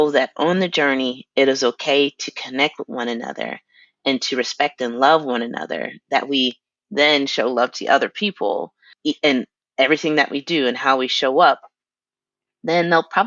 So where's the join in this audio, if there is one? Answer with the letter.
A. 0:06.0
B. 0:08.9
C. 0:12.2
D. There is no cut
B